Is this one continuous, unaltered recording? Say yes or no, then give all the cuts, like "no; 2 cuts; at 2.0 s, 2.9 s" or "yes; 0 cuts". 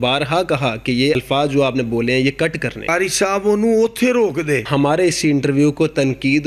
no; 3 cuts; at 1.2 s, 2.9 s, 4.7 s